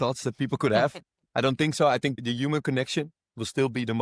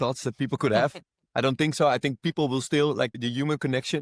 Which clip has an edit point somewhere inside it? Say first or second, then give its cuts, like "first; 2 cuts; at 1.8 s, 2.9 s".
first; 1 cut; at 2.2 s